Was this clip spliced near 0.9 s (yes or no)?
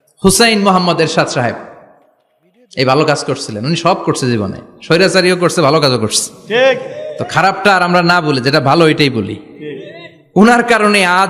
no